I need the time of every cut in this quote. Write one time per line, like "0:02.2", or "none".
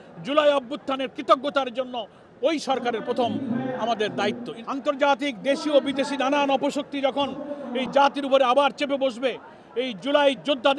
0:04.5